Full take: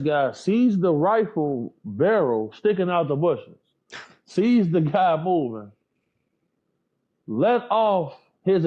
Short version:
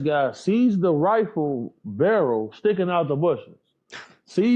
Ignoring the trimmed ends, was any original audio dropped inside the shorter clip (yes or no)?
no